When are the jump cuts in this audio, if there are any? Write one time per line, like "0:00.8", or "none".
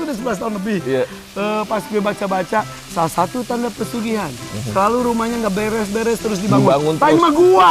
none